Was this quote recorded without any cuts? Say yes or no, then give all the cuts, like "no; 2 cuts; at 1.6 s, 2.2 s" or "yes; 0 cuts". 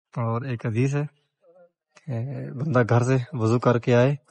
yes; 0 cuts